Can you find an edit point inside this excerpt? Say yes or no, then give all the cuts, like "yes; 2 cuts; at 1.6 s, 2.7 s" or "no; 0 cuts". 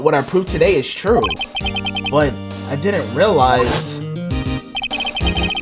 yes; 1 cut; at 1.4 s